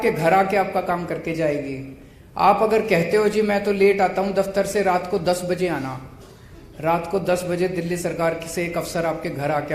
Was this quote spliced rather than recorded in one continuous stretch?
no; 0 cuts

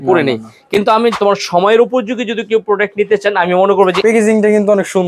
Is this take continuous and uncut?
no; 2 cuts; at 1.1 s, 4.0 s

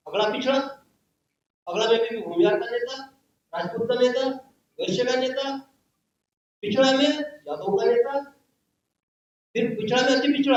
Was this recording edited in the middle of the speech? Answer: no; 0 cuts

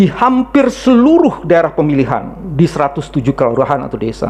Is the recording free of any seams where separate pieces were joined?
yes; 0 cuts

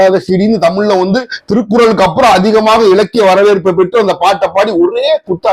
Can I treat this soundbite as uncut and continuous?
yes; 0 cuts

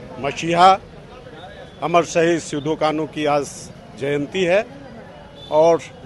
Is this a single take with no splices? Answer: yes; 0 cuts

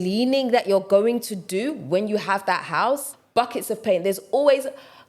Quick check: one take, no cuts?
no; 1 cut; at 3.1 s

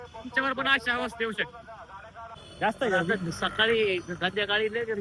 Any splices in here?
yes; 1 cut; at 2.4 s

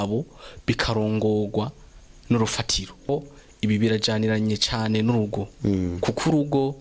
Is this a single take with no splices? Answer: no; 1 cut; at 3.1 s

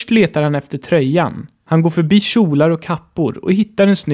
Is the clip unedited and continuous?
no; 1 cut; at 1.5 s

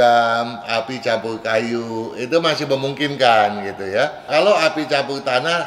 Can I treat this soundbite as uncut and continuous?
no; 1 cut; at 4.3 s

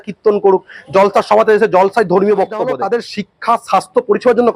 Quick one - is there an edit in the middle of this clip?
yes; 1 cut; at 2.7 s

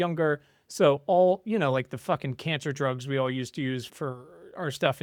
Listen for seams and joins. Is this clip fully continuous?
yes; 0 cuts

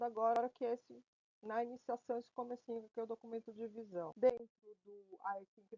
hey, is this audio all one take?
no; 1 cut; at 4.1 s

